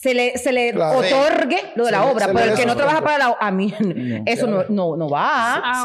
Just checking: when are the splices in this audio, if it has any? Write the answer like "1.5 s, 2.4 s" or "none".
none